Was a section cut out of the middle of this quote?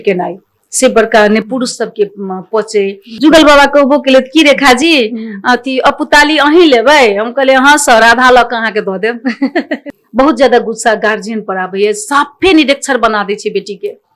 yes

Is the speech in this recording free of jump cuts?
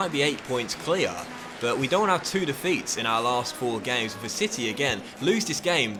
yes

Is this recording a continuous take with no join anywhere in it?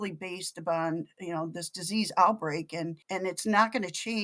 no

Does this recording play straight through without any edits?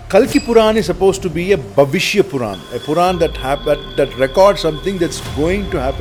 yes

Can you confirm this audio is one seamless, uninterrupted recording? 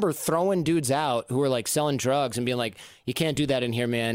yes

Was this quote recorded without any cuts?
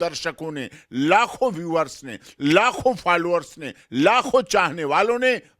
yes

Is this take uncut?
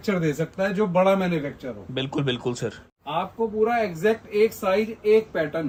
yes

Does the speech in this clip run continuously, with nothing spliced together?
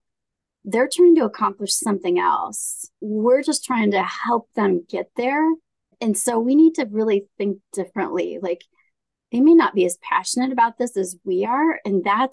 no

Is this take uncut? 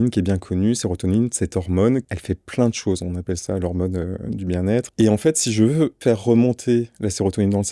no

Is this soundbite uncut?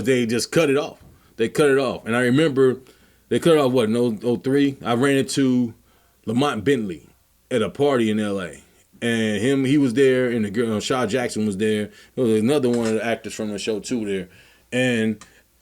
yes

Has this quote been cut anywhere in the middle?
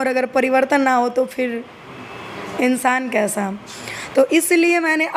no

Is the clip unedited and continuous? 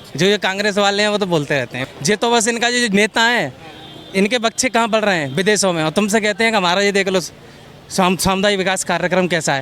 no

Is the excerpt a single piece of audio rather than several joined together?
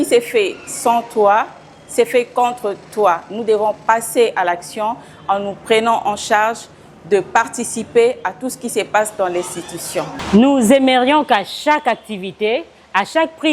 no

